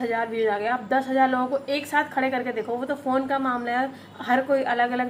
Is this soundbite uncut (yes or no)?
yes